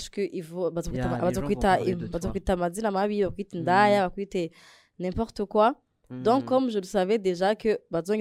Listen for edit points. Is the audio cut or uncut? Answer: uncut